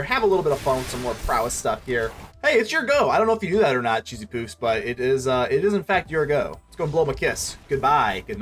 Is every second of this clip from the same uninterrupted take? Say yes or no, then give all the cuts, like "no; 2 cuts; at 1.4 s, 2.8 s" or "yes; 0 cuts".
no; 1 cut; at 2.2 s